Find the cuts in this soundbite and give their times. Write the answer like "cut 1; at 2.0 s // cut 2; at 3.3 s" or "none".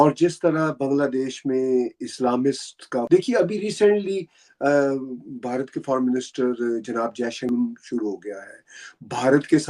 cut 1; at 3.1 s // cut 2; at 7.5 s